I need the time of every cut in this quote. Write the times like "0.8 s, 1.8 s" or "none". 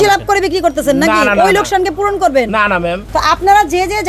3.0 s